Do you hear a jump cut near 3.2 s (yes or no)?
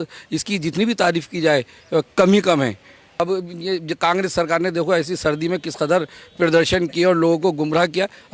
yes